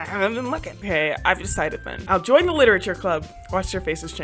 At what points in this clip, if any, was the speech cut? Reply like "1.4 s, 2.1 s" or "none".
0.8 s, 1.9 s